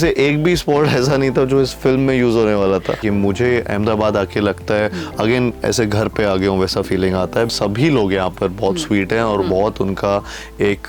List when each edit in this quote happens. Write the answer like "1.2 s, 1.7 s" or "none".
3.0 s, 7.5 s